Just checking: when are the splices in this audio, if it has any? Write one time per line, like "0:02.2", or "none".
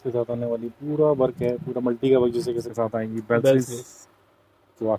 0:02.7